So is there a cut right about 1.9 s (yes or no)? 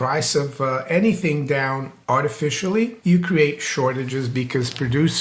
yes